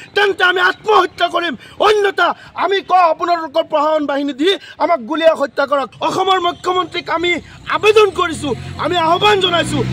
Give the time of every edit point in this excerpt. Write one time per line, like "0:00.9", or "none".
0:05.9